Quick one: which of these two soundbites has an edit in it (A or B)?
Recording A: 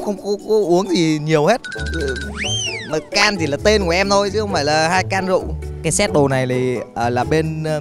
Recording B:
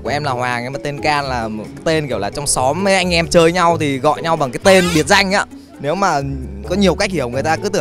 A